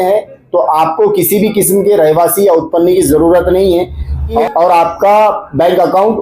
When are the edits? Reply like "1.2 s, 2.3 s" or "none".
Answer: 4.4 s